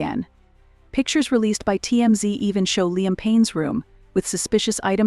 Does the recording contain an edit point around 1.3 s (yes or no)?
yes